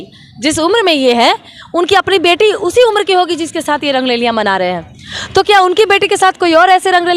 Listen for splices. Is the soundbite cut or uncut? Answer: uncut